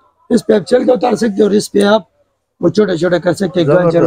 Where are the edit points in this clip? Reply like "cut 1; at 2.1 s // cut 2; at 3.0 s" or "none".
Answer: none